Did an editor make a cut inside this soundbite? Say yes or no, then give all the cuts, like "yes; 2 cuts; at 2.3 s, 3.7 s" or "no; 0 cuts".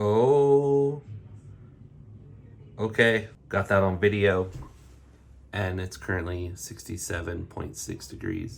yes; 1 cut; at 3.4 s